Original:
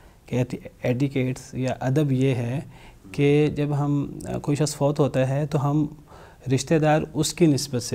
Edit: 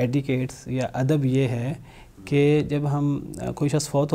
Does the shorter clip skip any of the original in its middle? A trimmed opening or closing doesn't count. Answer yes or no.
no